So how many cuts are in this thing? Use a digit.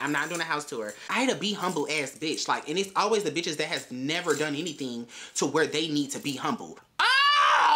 2